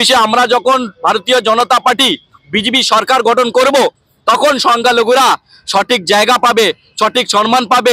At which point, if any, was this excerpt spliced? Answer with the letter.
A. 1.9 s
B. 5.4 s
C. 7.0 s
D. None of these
D